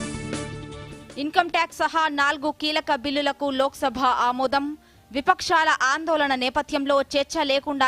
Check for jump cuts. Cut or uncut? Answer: cut